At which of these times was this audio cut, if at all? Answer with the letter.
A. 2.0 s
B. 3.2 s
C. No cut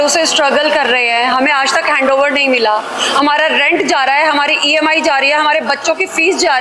C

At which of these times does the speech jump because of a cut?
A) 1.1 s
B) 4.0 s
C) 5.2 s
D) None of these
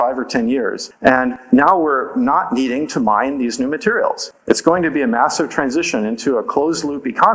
A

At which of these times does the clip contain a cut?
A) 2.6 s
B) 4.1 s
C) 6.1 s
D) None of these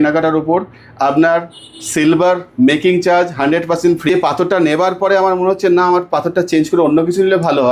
B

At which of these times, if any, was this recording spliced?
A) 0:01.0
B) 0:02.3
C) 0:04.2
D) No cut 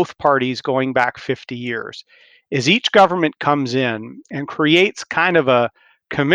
D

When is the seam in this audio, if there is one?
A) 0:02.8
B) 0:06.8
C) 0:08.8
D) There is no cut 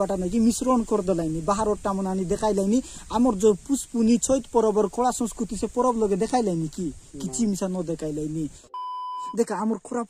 C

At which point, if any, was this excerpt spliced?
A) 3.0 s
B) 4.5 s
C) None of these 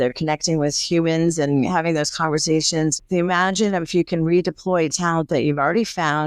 A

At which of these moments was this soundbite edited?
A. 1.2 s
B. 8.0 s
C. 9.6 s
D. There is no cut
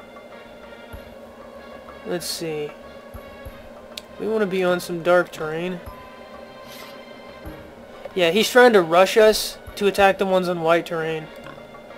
A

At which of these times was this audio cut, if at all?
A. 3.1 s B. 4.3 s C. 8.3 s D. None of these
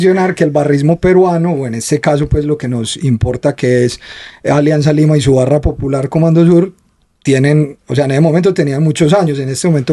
D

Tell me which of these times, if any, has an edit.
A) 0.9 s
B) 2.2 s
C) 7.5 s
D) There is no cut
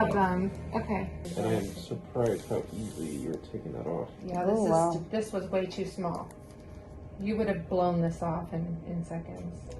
D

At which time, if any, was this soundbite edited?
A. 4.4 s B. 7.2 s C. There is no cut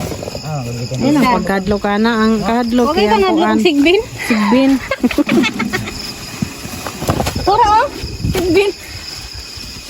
B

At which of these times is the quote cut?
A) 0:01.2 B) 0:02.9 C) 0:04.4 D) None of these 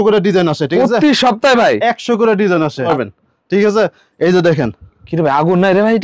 B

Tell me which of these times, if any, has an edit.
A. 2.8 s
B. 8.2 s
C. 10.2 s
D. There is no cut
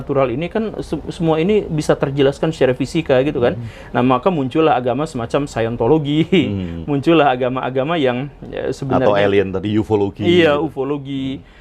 D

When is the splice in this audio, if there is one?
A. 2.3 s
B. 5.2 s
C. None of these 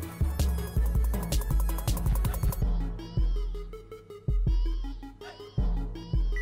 A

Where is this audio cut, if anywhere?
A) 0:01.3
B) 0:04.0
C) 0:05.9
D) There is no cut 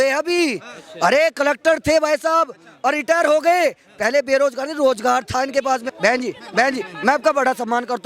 C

